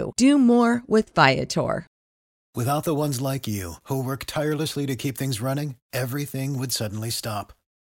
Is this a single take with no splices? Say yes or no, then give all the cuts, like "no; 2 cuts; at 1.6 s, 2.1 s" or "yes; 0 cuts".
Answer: yes; 0 cuts